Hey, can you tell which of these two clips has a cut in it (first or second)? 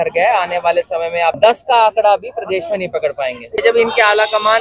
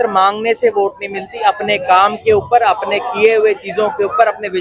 first